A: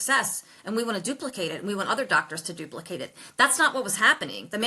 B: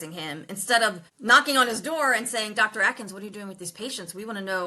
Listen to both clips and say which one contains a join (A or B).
B